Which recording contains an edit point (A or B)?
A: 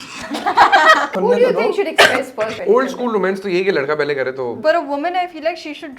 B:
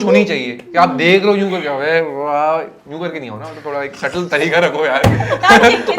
A